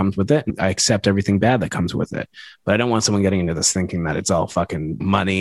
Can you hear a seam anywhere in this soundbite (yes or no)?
no